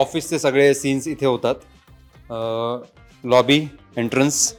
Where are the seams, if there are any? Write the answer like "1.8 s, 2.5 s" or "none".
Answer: none